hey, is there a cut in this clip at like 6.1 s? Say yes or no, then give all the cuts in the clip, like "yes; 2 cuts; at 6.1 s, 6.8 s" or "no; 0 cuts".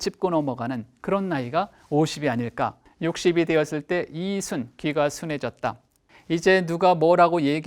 yes; 2 cuts; at 2.8 s, 6.1 s